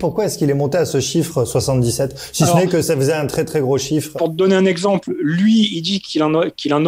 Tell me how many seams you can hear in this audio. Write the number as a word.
one